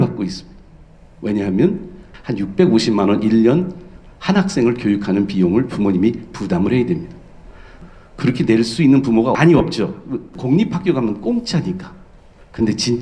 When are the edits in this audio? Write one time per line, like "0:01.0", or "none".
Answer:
0:02.0
0:07.8
0:09.4
0:10.4

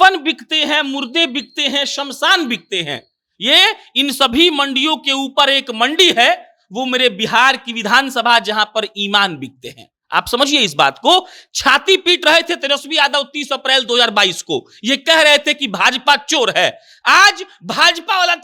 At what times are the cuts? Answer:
none

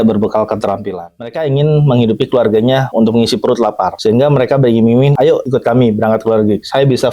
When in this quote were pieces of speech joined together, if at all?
0:01.0
0:02.9
0:03.9
0:05.2

